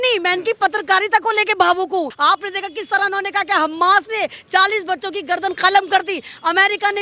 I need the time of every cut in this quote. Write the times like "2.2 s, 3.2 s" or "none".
2.1 s